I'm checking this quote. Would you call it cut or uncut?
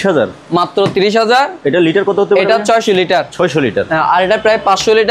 uncut